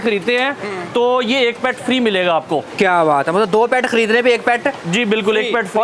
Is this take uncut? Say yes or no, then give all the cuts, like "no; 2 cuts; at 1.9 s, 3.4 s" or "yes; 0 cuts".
yes; 0 cuts